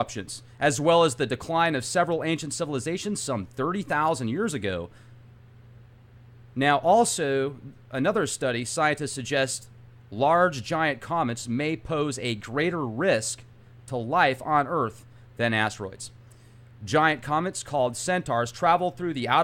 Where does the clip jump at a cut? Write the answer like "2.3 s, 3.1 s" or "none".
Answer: none